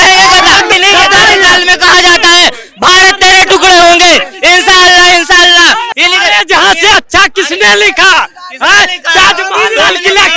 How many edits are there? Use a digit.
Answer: 2